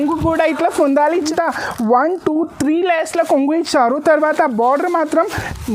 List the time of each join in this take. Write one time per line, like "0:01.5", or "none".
0:01.3